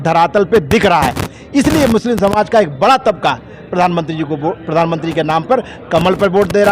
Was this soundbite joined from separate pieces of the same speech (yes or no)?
no